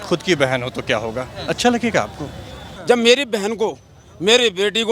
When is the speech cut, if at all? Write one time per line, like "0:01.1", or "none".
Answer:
0:02.7